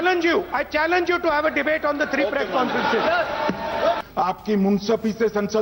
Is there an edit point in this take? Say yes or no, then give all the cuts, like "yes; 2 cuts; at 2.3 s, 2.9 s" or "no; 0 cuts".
yes; 1 cut; at 4.0 s